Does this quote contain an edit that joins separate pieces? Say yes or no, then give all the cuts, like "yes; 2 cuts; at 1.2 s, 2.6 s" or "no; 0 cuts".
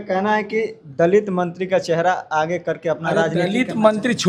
no; 0 cuts